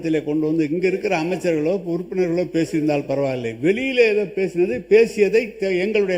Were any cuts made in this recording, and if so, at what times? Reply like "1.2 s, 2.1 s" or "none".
none